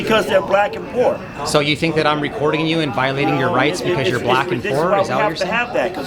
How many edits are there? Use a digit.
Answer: 0